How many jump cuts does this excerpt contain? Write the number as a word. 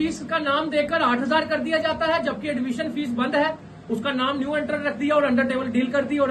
zero